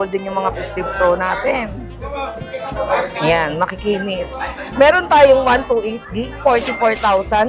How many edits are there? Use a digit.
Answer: 0